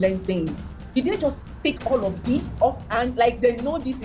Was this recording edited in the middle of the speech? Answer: no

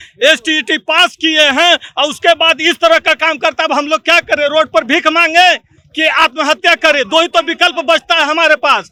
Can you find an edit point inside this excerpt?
no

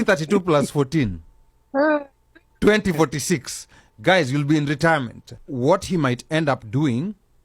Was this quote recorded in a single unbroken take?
no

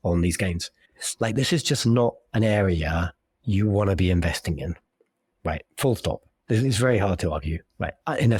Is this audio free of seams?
yes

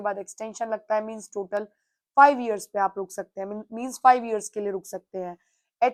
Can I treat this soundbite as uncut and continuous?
yes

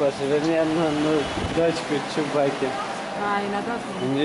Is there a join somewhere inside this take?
no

